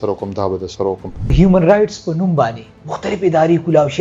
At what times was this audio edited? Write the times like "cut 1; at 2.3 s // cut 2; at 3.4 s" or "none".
cut 1; at 1.3 s